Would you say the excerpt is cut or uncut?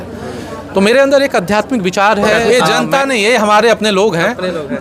cut